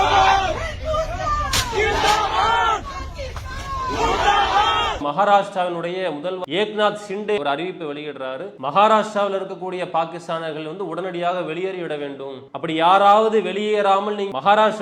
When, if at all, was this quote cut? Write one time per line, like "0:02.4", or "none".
0:05.0
0:06.4
0:07.4
0:08.5
0:12.4

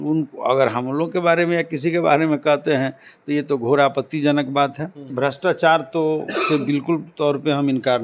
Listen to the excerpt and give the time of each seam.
0:05.1

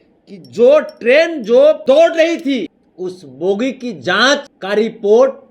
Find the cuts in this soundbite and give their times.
0:01.8
0:02.8
0:04.5

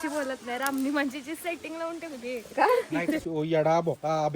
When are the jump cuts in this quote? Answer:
0:03.2

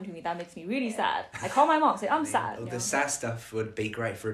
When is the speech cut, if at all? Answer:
0:01.3
0:02.6

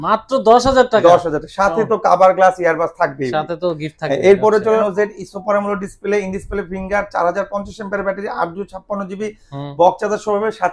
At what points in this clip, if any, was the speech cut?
0:04.8

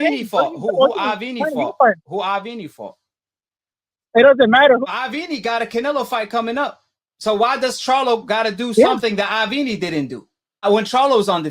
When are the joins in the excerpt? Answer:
0:04.8
0:10.6

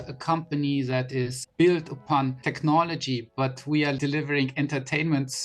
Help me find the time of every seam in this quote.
0:01.4
0:02.4
0:04.0

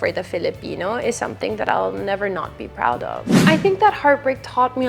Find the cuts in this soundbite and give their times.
0:03.3

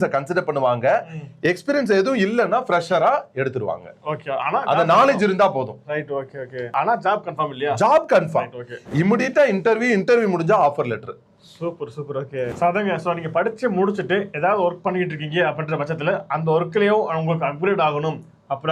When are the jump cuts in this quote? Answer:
none

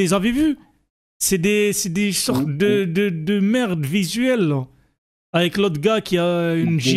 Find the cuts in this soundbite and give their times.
none

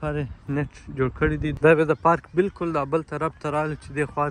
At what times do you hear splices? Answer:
0:01.5

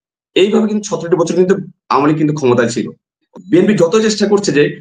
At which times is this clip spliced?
0:03.2

